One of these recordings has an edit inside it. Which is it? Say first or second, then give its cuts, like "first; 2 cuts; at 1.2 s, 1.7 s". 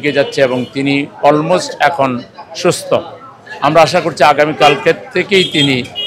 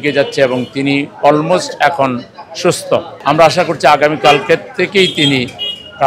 second; 1 cut; at 3.1 s